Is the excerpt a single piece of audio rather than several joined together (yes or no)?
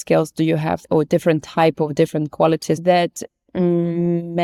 yes